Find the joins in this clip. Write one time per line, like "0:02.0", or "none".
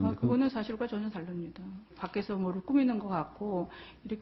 none